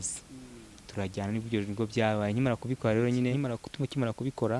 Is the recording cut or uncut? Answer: cut